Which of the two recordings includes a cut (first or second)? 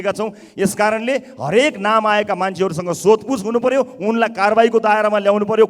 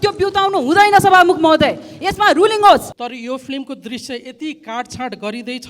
second